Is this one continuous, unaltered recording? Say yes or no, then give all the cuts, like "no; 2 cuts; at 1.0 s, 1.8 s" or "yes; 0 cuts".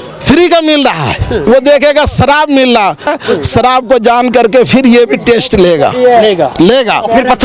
no; 2 cuts; at 1.5 s, 3.1 s